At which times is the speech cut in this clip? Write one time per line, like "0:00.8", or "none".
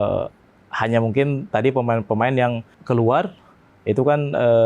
0:02.7

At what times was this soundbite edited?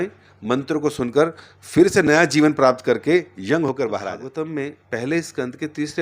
0:04.2

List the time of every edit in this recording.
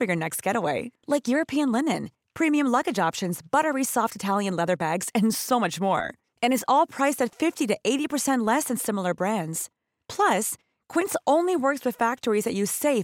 none

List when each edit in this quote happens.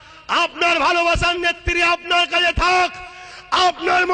none

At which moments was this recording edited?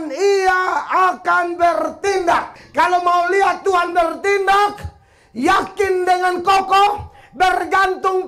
0:02.6

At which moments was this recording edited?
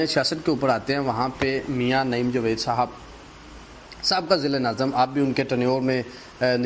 none

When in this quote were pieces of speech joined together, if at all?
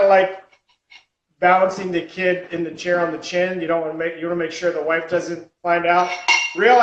none

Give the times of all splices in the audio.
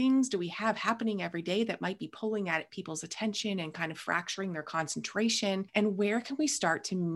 0:05.7

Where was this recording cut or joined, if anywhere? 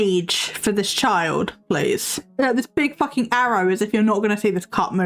0:02.2

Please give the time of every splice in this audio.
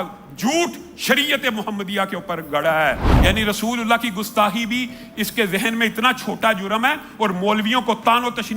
0:03.1

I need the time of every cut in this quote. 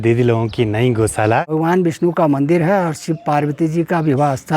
0:01.5

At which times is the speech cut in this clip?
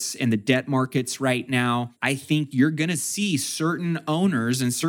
0:01.9

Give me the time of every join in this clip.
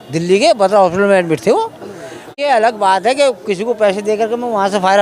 0:02.3

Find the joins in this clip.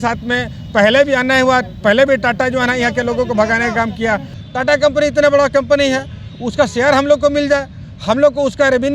0:04.3

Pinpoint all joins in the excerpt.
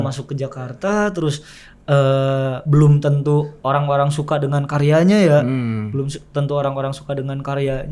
none

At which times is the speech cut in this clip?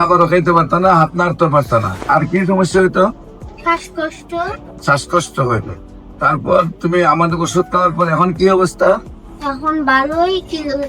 0:02.0
0:04.7

